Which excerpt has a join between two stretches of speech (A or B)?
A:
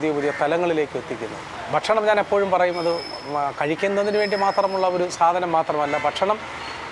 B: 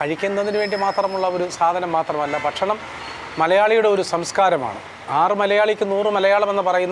A